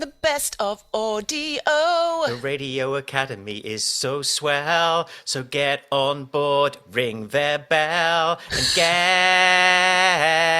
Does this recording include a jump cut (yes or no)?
yes